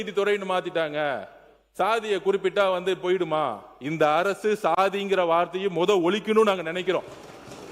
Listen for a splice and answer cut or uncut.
uncut